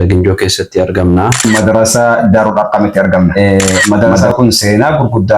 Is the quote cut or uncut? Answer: cut